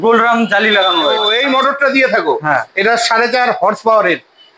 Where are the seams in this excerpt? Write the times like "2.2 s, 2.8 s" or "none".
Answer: 1.3 s